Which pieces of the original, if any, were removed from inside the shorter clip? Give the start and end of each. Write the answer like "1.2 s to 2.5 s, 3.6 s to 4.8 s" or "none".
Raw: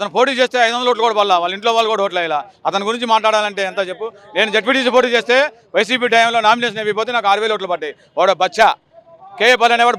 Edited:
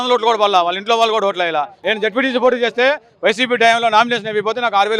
2.5 s to 4.3 s